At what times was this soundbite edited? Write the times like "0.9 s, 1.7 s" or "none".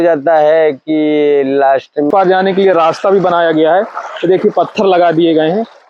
2.1 s